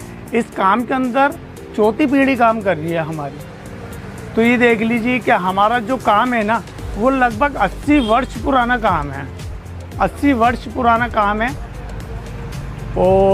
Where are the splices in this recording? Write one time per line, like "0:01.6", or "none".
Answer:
none